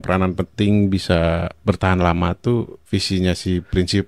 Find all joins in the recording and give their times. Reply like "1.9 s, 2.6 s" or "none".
2.8 s

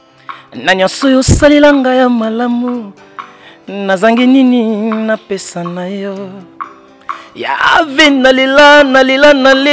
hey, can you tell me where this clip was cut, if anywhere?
none

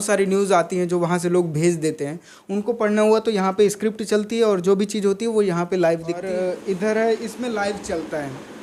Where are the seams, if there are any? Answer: 6.3 s

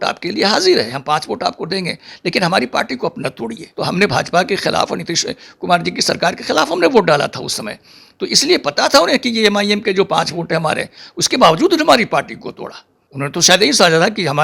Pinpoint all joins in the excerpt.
3.7 s, 12.9 s

